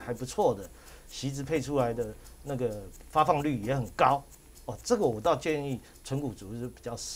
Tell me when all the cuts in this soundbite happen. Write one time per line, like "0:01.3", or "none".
none